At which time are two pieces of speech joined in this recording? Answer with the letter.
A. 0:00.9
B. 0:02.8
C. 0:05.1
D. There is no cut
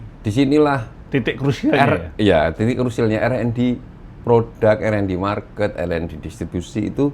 A